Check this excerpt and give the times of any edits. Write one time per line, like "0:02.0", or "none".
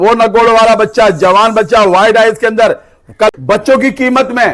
0:03.3